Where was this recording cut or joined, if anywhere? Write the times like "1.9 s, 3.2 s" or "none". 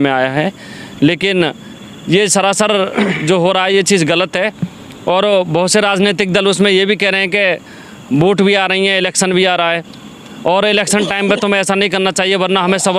none